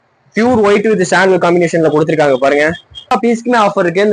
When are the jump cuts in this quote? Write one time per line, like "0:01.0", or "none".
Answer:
0:03.1